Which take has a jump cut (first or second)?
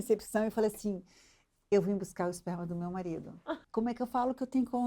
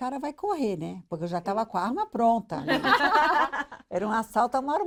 first